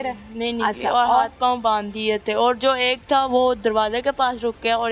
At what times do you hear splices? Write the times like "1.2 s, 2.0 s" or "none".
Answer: none